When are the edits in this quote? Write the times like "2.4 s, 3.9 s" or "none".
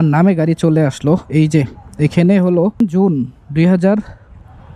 2.8 s